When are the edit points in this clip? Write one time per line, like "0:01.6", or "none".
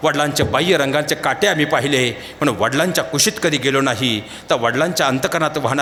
none